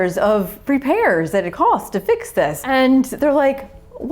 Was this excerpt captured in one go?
no; 1 cut; at 2.6 s

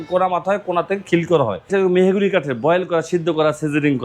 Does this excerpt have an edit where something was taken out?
yes; 1 cut; at 1.7 s

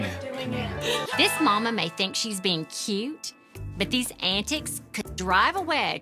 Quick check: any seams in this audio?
yes; 1 cut; at 1.1 s

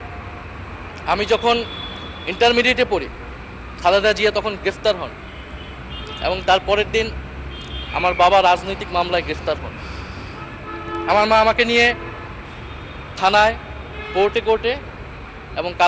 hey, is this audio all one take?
yes; 0 cuts

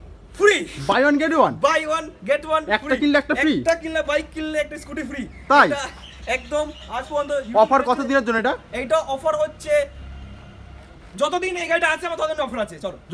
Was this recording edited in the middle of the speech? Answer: no; 0 cuts

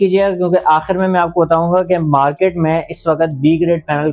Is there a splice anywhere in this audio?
no; 0 cuts

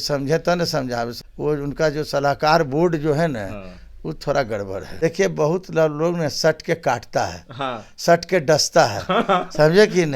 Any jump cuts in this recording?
yes; 2 cuts; at 1.2 s, 4.8 s

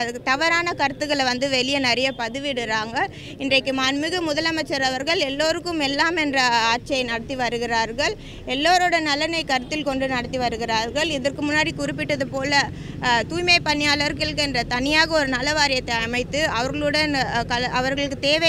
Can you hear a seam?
no; 0 cuts

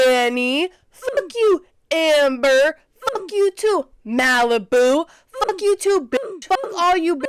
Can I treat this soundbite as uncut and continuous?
yes; 0 cuts

